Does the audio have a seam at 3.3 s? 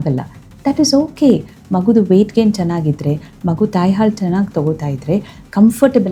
no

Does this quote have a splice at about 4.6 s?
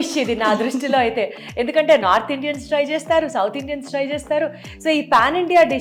no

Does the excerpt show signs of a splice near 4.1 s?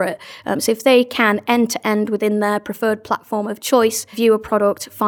yes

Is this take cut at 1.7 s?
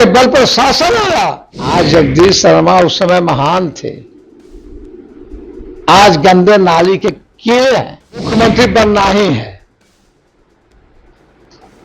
yes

